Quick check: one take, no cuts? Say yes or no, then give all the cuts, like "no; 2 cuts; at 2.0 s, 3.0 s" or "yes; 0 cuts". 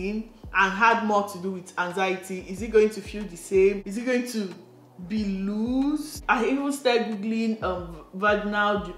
no; 2 cuts; at 3.9 s, 6.1 s